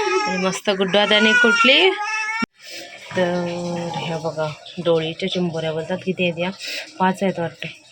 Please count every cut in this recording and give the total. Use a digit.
1